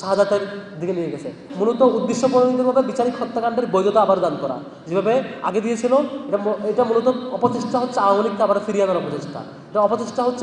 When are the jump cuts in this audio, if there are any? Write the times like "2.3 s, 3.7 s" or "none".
1.4 s